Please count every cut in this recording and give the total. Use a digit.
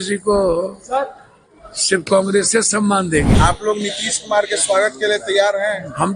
1